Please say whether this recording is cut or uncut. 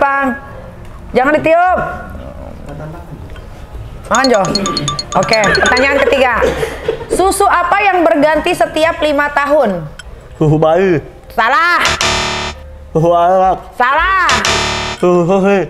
uncut